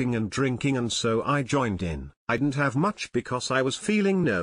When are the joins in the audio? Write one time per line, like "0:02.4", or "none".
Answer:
0:02.3